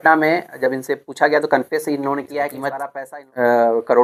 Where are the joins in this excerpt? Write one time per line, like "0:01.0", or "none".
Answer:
none